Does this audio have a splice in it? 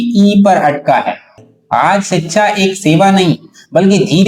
yes; 1 cut; at 1.5 s

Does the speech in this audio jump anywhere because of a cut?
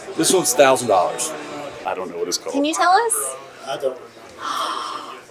yes; 1 cut; at 1.8 s

